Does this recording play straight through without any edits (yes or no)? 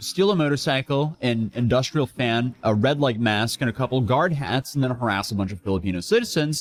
yes